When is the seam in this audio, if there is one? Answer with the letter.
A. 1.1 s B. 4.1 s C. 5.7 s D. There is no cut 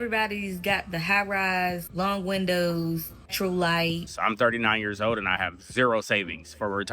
B